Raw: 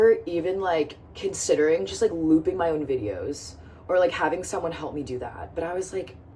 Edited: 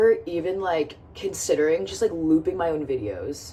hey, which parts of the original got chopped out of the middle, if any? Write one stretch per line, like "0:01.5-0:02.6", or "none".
none